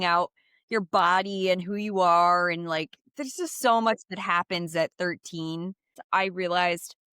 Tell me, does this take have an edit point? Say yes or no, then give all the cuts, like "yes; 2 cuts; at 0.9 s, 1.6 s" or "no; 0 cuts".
yes; 1 cut; at 5.9 s